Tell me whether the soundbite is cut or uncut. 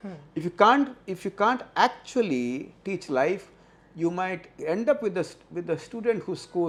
uncut